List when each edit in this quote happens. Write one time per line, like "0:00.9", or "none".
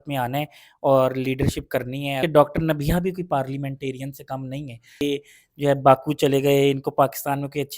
0:02.2
0:05.0